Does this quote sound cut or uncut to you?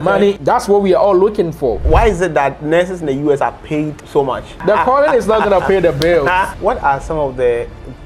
cut